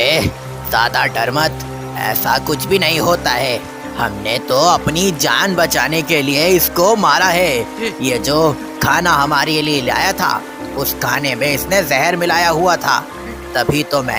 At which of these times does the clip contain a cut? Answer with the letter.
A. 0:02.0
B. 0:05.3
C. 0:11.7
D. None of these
D